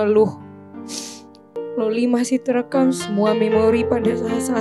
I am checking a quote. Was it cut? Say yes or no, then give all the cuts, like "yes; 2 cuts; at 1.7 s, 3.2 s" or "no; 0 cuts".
yes; 1 cut; at 1.5 s